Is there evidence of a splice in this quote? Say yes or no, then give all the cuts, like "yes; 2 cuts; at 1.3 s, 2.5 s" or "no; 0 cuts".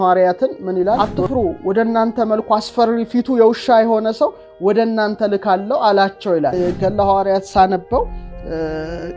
yes; 2 cuts; at 1.1 s, 6.5 s